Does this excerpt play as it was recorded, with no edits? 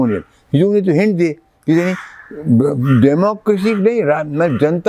yes; 0 cuts

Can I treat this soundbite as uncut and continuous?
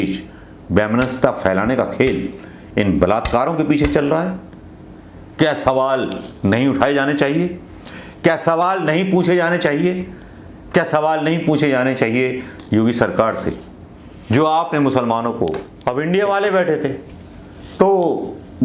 no; 1 cut; at 15.7 s

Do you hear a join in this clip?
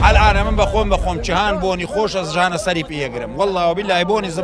no; 0 cuts

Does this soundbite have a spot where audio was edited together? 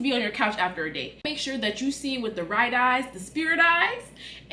yes; 1 cut; at 1.3 s

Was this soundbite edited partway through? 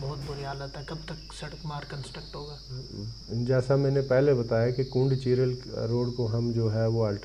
no; 0 cuts

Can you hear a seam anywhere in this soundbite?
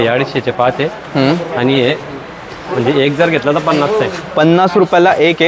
no; 0 cuts

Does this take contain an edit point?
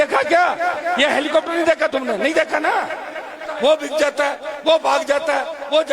yes; 1 cut; at 3.5 s

